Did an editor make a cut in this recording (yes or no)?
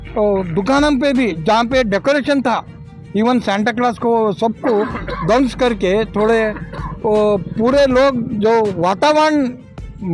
no